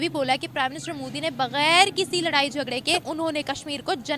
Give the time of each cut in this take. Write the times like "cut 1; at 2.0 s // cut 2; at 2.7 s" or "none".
cut 1; at 3.1 s